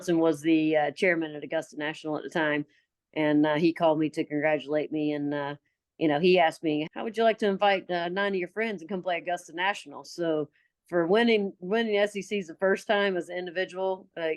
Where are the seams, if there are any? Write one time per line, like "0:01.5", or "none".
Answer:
0:06.9